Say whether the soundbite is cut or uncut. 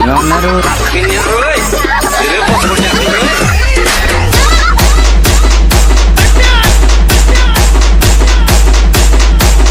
uncut